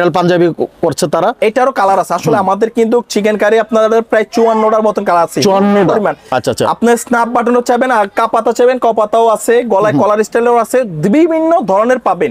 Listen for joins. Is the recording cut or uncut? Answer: uncut